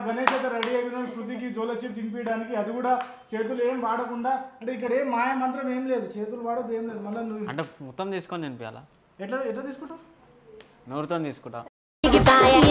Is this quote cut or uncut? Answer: uncut